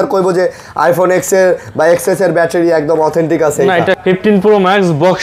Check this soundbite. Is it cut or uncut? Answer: cut